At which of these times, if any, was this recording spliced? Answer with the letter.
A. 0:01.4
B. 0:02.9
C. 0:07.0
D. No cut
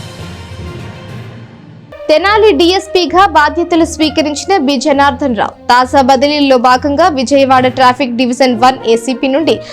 A